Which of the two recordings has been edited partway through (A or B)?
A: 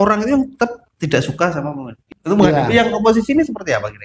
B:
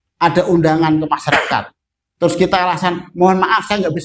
A